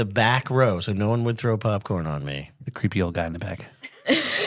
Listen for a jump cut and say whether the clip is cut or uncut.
uncut